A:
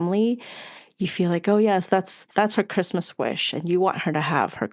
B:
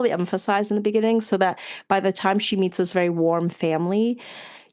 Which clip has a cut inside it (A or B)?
A